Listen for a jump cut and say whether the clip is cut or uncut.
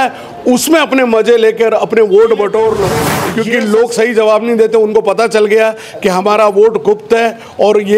cut